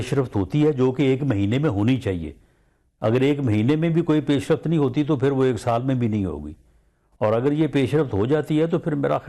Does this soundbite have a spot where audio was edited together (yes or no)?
no